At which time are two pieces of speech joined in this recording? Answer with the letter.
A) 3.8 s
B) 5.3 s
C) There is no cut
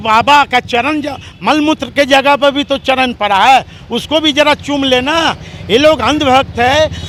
C